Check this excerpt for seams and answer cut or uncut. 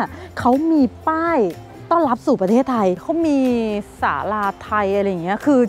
cut